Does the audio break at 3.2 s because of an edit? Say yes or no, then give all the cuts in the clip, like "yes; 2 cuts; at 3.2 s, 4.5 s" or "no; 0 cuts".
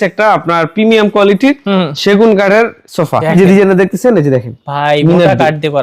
yes; 1 cut; at 3.2 s